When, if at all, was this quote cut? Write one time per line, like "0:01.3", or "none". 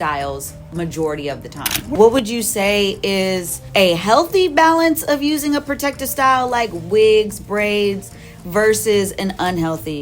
0:01.9
0:03.5